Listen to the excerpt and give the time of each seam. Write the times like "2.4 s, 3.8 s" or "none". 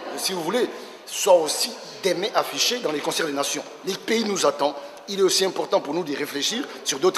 4.8 s